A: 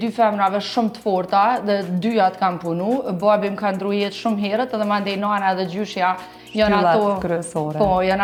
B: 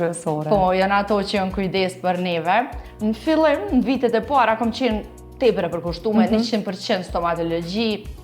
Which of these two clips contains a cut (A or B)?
B